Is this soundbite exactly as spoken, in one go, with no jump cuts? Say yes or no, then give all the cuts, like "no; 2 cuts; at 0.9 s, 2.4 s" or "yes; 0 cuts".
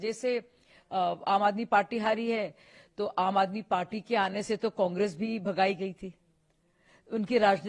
yes; 0 cuts